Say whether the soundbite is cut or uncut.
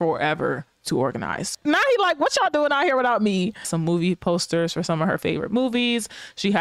cut